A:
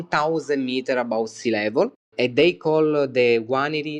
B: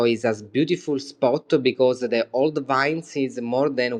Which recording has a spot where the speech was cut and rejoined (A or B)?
A